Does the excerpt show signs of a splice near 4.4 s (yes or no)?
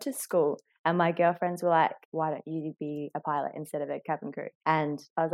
no